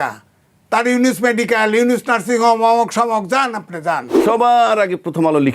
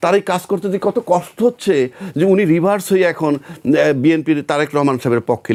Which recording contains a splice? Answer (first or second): first